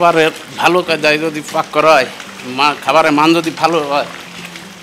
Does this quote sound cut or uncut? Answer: uncut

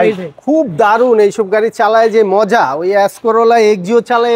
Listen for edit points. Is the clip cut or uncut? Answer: uncut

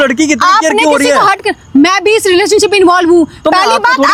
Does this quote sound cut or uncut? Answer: uncut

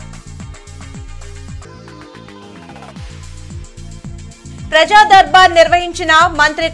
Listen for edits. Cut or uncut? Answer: cut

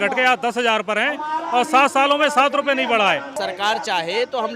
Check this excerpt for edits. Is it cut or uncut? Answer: cut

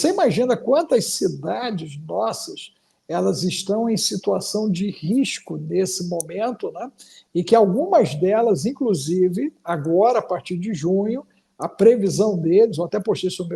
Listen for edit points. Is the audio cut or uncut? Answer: uncut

